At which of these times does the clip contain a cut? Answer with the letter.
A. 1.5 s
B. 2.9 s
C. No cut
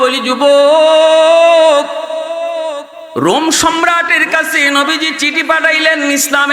B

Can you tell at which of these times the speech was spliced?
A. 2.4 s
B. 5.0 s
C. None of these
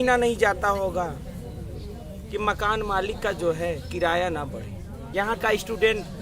B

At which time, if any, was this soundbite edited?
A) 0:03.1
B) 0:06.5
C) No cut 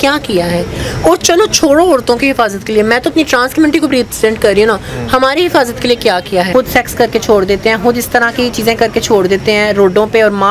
B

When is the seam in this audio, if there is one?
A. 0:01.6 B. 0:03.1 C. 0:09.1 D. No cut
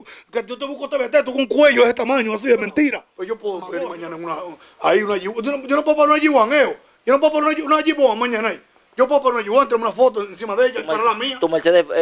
B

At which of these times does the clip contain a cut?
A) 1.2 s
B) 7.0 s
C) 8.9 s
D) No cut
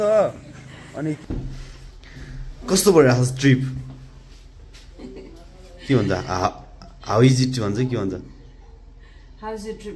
A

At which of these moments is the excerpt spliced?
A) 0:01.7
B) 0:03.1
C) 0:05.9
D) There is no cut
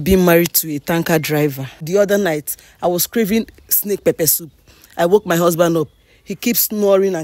A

